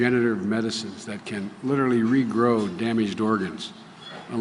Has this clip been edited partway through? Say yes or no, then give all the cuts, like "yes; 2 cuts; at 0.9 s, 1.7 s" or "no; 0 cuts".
no; 0 cuts